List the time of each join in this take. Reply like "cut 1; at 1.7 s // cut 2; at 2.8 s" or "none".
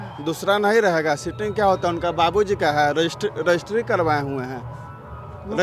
none